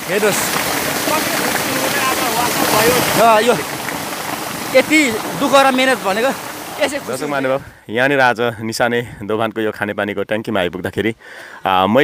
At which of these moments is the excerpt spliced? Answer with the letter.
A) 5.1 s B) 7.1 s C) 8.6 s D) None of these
B